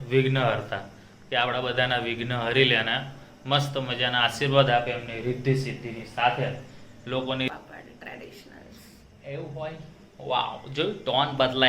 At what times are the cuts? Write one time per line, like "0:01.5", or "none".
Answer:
0:07.5